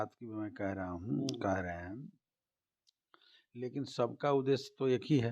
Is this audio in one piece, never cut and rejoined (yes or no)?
yes